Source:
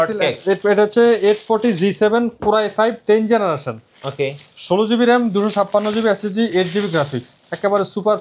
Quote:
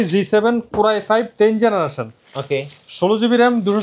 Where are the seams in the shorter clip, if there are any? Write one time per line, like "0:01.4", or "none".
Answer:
none